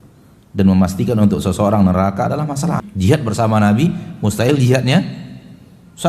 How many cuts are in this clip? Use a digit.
1